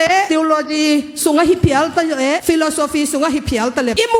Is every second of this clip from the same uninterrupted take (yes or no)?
yes